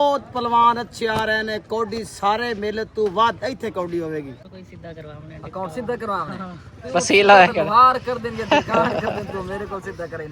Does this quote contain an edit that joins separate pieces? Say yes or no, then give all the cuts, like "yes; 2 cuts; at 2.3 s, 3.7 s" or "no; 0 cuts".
yes; 1 cut; at 4.5 s